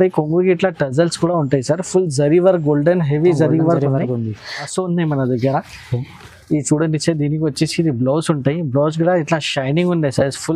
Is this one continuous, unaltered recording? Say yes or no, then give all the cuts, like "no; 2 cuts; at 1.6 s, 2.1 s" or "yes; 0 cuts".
no; 1 cut; at 4.7 s